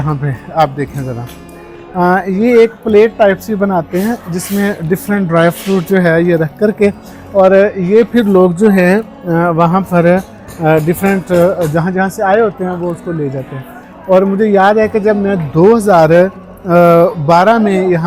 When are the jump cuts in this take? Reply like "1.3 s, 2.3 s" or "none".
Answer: none